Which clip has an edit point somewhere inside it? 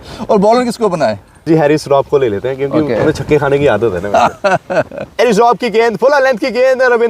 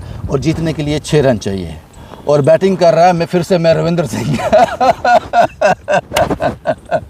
first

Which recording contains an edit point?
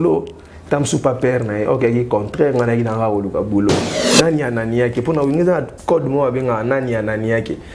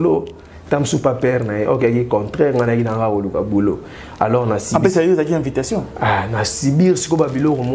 first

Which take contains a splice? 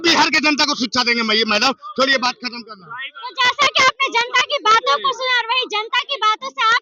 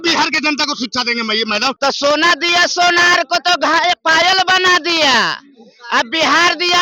second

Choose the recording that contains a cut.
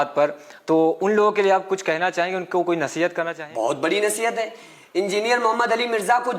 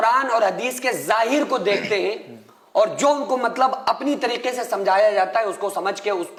first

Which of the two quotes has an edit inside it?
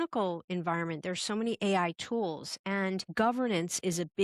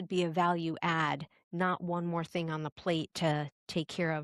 first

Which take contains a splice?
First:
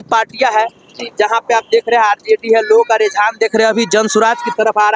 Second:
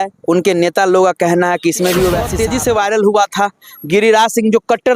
second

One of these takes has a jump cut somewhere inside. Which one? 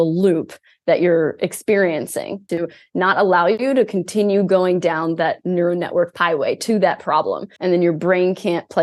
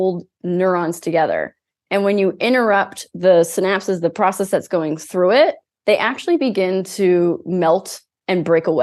first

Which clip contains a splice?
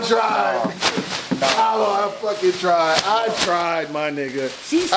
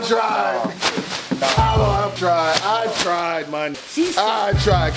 second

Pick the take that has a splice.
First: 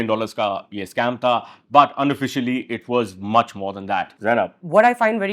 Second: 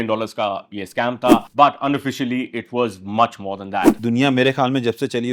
second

